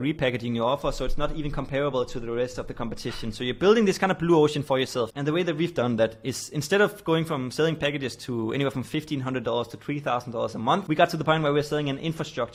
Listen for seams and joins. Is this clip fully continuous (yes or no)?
yes